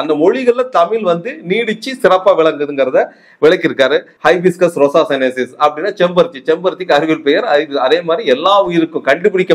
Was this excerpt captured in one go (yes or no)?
no